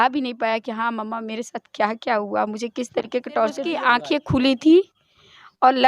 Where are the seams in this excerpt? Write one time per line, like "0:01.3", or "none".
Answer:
0:03.9